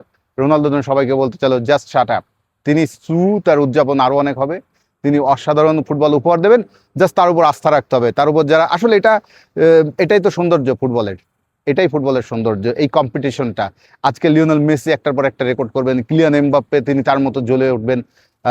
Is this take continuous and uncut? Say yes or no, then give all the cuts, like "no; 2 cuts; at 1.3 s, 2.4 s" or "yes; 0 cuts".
yes; 0 cuts